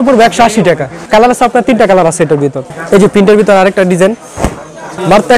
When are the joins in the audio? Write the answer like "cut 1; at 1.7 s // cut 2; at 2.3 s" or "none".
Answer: none